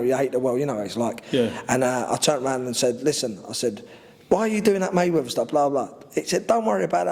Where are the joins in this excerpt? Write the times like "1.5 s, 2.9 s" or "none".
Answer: none